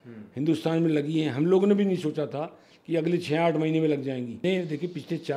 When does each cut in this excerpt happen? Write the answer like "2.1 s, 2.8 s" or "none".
4.4 s